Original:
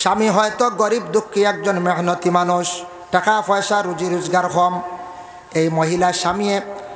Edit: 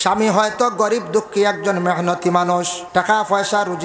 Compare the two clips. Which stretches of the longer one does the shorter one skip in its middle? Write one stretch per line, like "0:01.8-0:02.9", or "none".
0:02.8-0:03.0